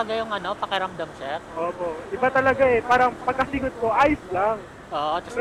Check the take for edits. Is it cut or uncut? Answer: uncut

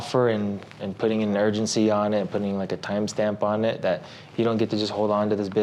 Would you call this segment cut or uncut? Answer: uncut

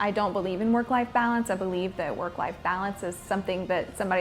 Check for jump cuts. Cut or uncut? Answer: uncut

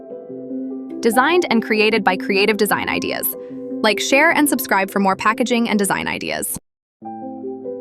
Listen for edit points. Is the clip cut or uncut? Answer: cut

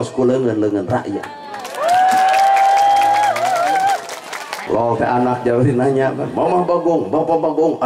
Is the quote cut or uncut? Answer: cut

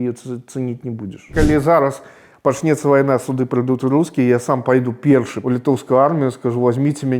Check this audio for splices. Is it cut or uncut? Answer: cut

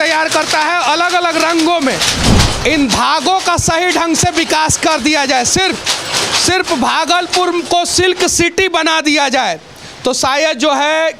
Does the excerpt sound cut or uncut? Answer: cut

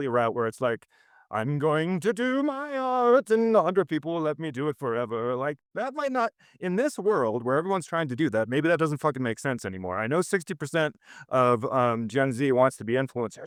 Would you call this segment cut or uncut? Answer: uncut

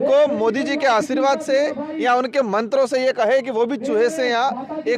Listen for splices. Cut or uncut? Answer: uncut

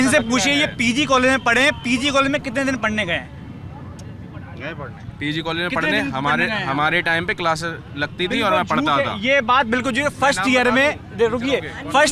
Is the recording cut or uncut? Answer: uncut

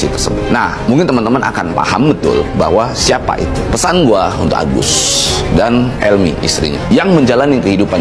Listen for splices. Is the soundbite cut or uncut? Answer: uncut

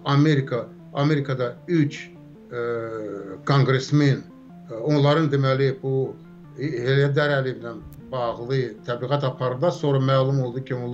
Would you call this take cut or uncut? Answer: uncut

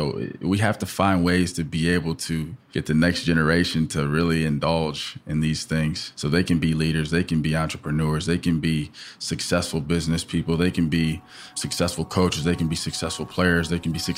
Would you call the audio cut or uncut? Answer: cut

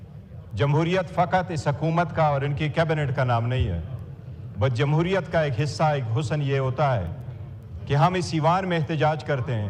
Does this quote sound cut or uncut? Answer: cut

